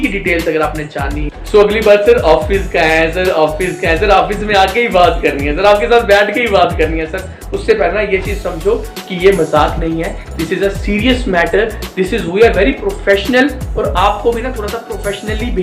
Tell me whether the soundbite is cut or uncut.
cut